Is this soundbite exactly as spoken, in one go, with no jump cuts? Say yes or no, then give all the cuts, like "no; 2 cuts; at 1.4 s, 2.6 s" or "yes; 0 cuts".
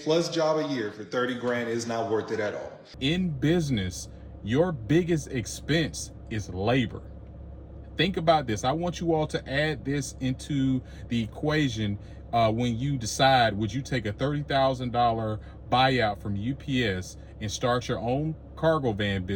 no; 1 cut; at 2.9 s